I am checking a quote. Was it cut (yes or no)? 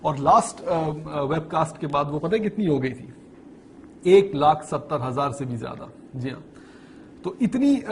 no